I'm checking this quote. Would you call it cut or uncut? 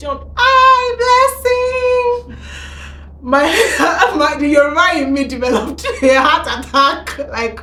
uncut